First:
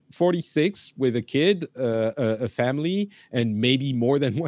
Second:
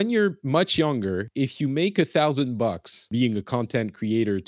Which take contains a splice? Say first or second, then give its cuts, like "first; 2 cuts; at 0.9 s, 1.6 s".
second; 2 cuts; at 1.3 s, 3.1 s